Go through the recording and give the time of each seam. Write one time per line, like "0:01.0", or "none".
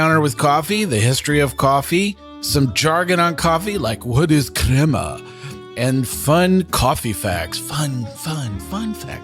0:02.3